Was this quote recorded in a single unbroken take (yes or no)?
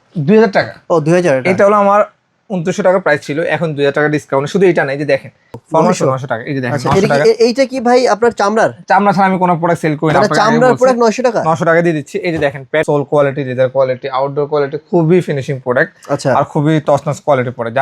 no